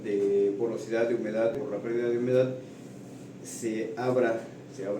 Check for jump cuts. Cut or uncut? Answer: cut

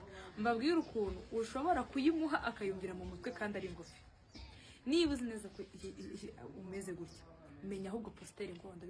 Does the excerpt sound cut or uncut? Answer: uncut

